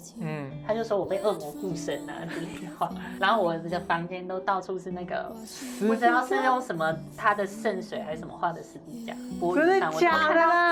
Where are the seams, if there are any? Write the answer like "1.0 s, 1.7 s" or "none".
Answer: none